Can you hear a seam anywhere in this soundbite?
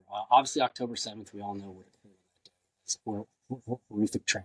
no; 0 cuts

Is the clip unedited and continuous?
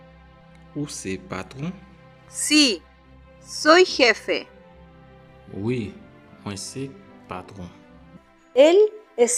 yes; 0 cuts

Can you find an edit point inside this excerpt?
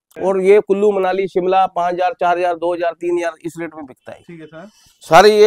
no; 0 cuts

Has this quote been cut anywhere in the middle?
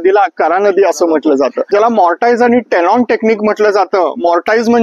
yes; 1 cut; at 1.6 s

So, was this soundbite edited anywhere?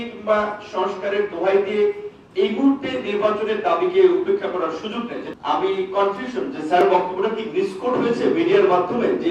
yes; 1 cut; at 5.2 s

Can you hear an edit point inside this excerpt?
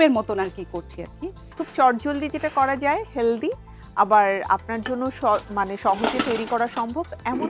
yes; 1 cut; at 1.4 s

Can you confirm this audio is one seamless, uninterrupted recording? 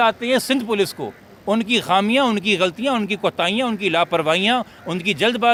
yes; 0 cuts

